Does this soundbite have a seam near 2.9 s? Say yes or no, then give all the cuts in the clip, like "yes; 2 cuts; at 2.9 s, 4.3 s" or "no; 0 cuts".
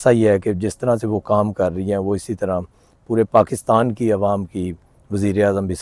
no; 0 cuts